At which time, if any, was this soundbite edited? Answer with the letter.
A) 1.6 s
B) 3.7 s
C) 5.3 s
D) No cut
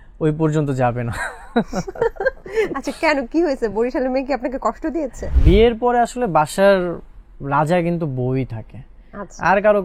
C